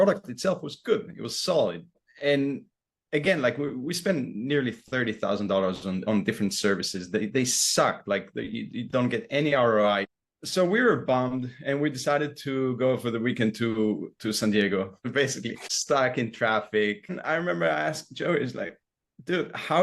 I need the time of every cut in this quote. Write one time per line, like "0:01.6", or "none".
0:10.1
0:15.0
0:17.2